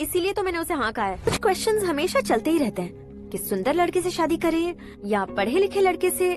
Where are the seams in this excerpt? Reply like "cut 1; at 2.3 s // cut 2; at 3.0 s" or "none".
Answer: cut 1; at 1.3 s